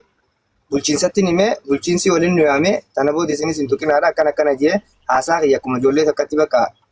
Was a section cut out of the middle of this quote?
no; 0 cuts

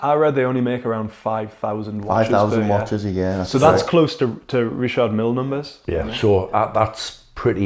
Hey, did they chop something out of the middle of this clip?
no; 0 cuts

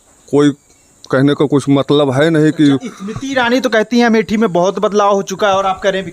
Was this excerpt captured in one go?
yes; 0 cuts

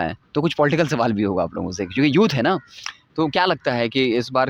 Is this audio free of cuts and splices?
yes; 0 cuts

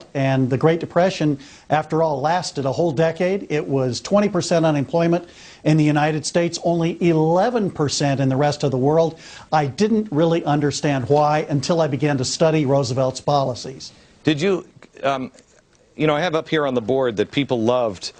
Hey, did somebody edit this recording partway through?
yes; 1 cut; at 10.8 s

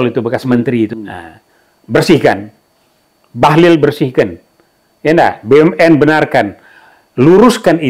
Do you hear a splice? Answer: yes; 1 cut; at 0.9 s

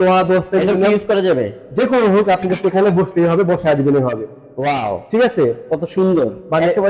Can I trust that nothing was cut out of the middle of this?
yes; 0 cuts

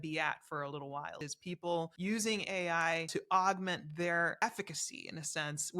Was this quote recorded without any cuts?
no; 3 cuts; at 1.7 s, 3.1 s, 4.4 s

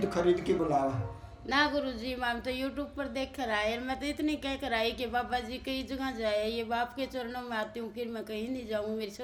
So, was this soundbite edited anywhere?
no; 0 cuts

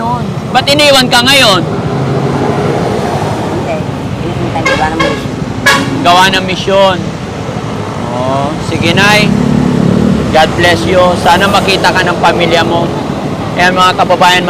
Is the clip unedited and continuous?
yes; 0 cuts

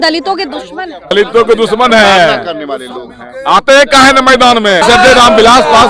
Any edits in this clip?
yes; 2 cuts; at 1.1 s, 4.8 s

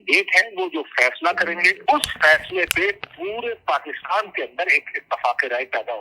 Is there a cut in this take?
yes; 1 cut; at 1.7 s

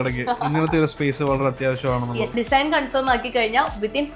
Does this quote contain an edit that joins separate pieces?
yes; 1 cut; at 2.3 s

